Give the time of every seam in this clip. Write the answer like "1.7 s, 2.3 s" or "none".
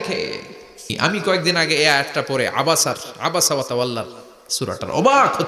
0.9 s